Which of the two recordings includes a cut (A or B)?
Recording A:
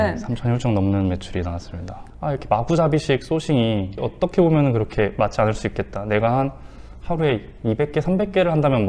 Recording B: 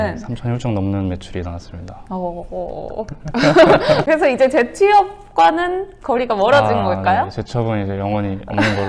A